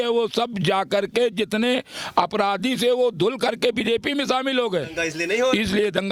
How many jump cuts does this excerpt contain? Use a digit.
0